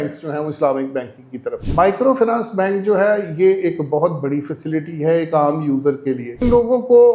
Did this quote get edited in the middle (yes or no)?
yes